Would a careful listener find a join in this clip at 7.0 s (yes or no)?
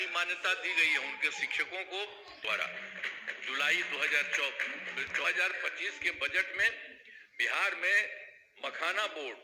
no